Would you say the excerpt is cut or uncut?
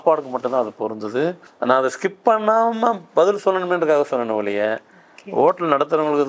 cut